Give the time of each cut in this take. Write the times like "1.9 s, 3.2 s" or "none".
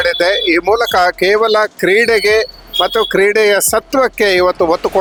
none